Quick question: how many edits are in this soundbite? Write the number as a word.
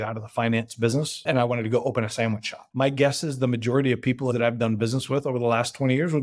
three